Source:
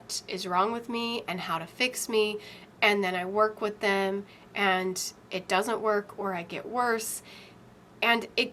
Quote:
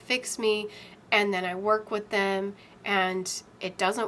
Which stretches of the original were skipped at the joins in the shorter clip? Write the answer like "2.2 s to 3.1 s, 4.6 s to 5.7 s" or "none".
none